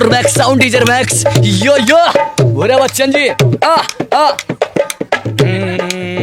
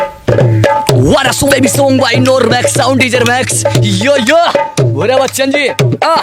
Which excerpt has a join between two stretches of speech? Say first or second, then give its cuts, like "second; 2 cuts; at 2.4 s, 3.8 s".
second; 1 cut; at 1.5 s